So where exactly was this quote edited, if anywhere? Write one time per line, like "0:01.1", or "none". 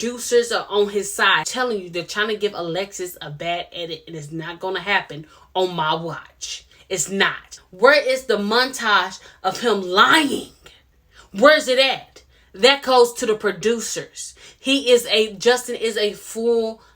0:01.5
0:07.6